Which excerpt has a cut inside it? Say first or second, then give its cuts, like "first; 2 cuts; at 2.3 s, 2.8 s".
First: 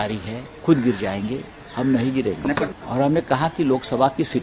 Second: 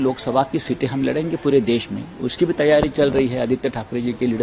first; 1 cut; at 2.7 s